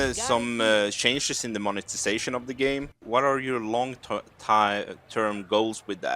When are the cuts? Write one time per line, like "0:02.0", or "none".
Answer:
0:03.0